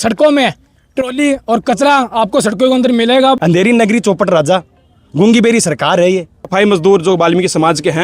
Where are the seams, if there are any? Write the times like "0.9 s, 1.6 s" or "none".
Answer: 3.4 s, 6.4 s